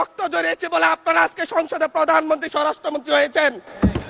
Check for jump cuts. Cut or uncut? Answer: uncut